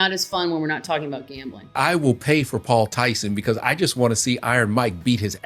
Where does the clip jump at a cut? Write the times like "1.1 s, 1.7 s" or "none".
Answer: 1.7 s